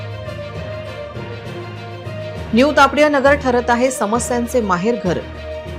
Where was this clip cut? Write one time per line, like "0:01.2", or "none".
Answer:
0:01.2